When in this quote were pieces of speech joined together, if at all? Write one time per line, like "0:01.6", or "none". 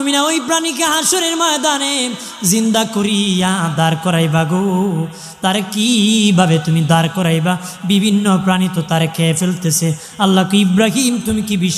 none